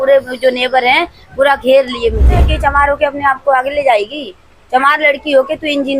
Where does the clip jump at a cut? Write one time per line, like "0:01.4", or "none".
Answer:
0:02.4